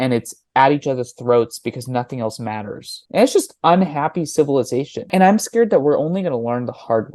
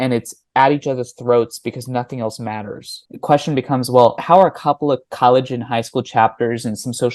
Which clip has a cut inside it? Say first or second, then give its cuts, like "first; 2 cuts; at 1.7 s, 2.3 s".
second; 1 cut; at 3.0 s